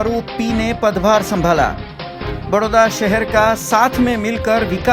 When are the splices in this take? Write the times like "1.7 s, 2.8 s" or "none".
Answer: none